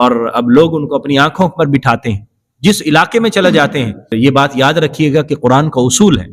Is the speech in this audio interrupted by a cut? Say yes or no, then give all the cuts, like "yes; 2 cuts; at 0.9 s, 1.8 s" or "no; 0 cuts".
yes; 1 cut; at 4.1 s